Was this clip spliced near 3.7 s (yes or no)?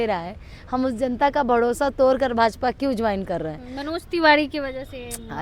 no